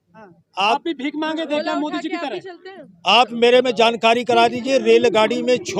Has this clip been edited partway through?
no; 0 cuts

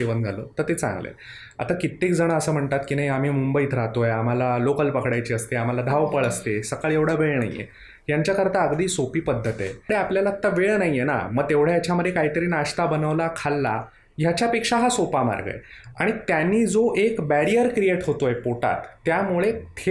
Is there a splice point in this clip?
yes; 1 cut; at 9.9 s

